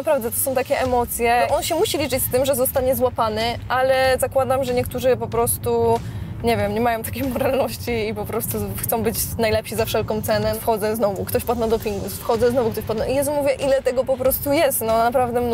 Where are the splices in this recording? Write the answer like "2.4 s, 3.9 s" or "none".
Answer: 1.4 s, 10.6 s